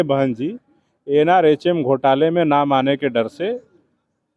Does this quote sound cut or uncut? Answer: uncut